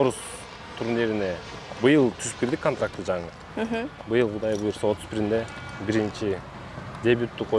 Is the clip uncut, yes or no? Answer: yes